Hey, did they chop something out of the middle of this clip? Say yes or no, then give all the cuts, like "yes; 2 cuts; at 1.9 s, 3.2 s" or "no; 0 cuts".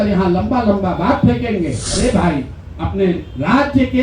yes; 1 cut; at 1.8 s